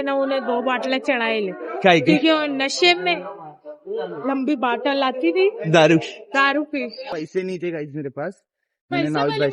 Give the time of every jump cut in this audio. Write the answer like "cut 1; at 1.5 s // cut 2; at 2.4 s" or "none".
cut 1; at 7.1 s